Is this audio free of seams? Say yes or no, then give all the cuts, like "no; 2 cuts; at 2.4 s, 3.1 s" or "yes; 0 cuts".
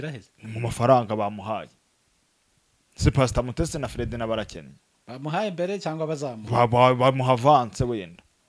yes; 0 cuts